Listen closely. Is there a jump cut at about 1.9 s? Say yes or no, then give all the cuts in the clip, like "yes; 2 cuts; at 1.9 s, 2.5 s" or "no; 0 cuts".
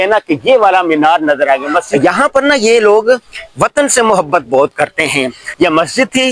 yes; 2 cuts; at 1.9 s, 5.4 s